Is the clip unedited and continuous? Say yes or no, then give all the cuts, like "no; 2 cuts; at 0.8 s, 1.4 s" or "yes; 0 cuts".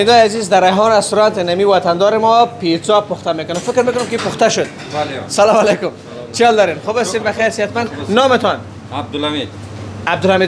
yes; 0 cuts